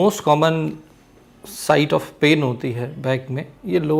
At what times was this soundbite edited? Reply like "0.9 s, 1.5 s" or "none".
none